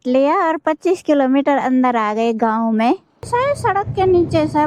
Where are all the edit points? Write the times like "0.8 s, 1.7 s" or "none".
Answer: 3.3 s